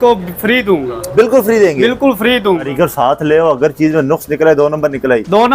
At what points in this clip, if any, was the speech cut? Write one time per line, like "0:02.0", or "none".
0:02.7